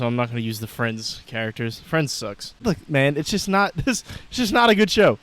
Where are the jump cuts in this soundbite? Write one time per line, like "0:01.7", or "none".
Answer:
0:02.6